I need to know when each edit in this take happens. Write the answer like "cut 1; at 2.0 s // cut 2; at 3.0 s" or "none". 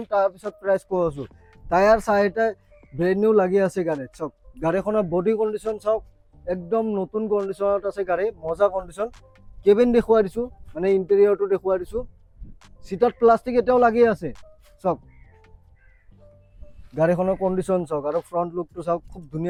none